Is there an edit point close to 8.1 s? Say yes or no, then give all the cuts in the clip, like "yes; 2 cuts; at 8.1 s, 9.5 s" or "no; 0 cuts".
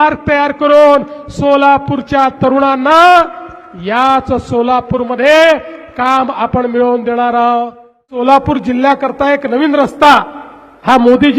yes; 1 cut; at 8.1 s